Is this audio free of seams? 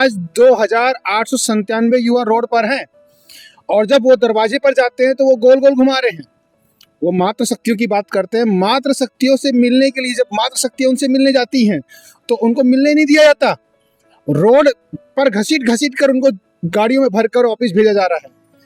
yes; 0 cuts

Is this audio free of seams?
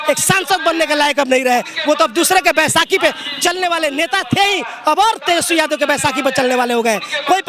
yes; 0 cuts

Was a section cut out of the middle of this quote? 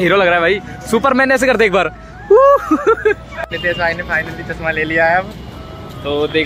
yes; 1 cut; at 3.3 s

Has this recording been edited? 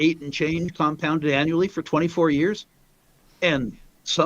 no; 0 cuts

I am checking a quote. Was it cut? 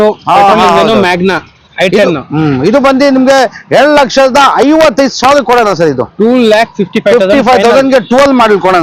no; 0 cuts

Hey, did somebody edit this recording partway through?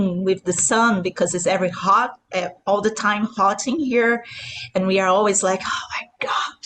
no; 0 cuts

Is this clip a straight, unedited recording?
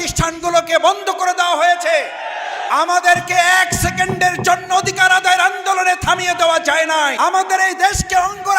no; 1 cut; at 7.1 s

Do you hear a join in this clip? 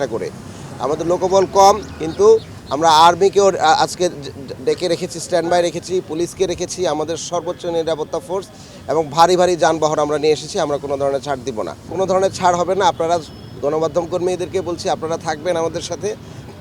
yes; 1 cut; at 11.9 s

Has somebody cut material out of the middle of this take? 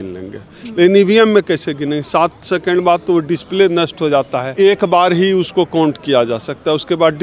yes; 1 cut; at 4.4 s

